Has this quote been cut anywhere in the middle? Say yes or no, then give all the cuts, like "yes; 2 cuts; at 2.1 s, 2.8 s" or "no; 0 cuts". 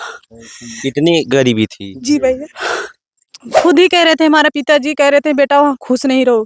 yes; 1 cut; at 3.3 s